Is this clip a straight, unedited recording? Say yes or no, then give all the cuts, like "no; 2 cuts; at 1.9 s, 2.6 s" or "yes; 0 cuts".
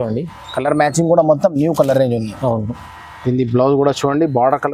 yes; 0 cuts